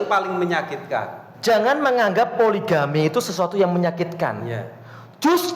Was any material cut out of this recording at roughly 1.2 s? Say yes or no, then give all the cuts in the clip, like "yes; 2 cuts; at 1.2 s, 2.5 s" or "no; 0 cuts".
yes; 1 cut; at 1.2 s